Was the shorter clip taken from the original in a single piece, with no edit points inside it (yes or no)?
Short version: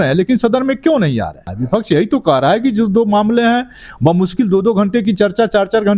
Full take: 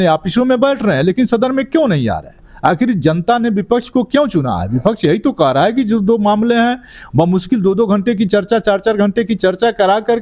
no